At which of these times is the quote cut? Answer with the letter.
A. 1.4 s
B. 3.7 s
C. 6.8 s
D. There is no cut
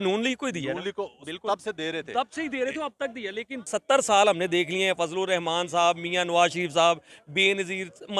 B